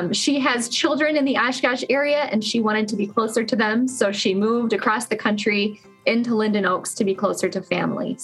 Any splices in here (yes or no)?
no